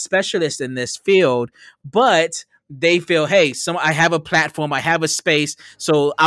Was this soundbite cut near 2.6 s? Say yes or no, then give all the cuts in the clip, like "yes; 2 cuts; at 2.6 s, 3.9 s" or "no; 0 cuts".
no; 0 cuts